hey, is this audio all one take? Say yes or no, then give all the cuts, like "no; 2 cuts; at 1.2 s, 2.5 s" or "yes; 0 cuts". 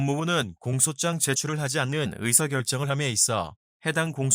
no; 1 cut; at 3.2 s